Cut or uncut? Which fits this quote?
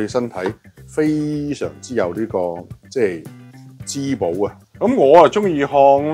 cut